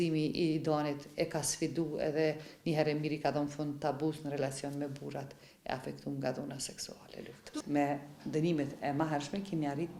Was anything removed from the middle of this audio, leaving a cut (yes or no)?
no